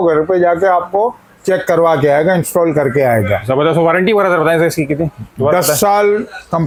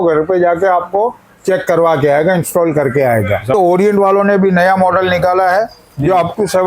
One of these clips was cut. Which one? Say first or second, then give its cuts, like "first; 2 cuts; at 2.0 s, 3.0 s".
second; 1 cut; at 3.5 s